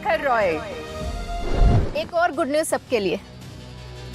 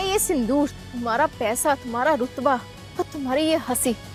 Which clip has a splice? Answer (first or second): first